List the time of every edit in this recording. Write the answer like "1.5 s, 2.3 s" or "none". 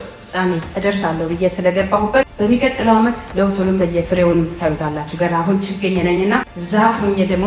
2.3 s, 6.6 s